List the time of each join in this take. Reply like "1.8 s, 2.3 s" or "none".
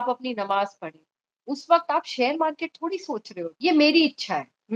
3.5 s

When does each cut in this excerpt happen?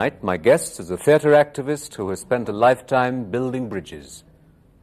2.7 s

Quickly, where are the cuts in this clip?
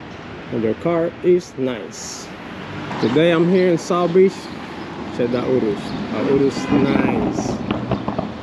2.9 s

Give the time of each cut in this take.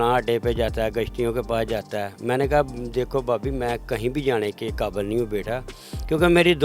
none

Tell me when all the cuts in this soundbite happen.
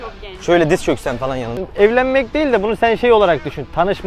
1.6 s

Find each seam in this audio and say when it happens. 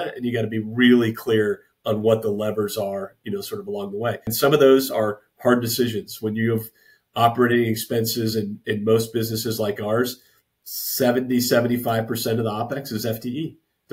4.3 s

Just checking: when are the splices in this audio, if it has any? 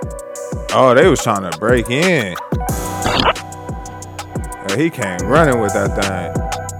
none

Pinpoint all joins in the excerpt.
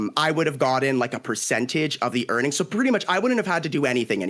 none

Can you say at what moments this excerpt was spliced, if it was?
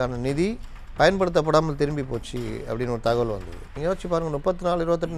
3.7 s

